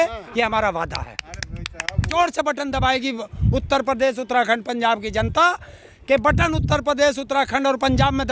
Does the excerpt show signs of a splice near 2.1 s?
yes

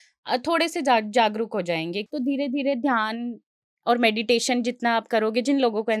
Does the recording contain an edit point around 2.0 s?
yes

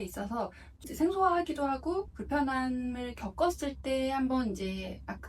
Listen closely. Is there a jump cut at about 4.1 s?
no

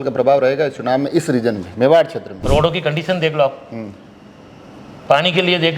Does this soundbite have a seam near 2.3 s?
yes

